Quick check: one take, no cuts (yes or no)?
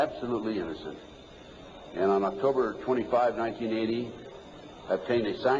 no